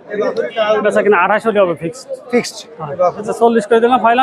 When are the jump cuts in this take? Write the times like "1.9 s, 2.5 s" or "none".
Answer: 3.3 s